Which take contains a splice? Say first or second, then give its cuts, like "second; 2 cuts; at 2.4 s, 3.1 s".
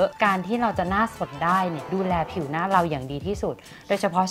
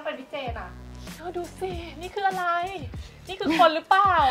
first; 1 cut; at 1.8 s